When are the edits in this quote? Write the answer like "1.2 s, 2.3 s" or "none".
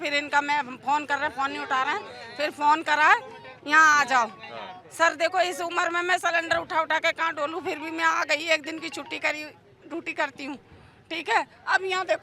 none

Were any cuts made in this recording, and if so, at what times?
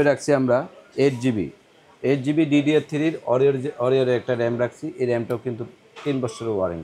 none

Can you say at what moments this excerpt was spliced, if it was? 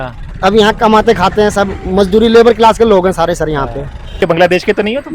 4.2 s

